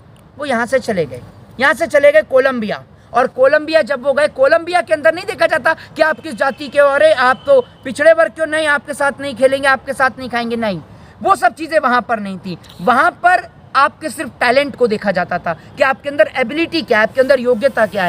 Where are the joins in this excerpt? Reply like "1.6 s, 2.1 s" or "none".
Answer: none